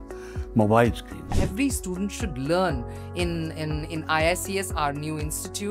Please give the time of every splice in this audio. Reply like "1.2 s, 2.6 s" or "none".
1.4 s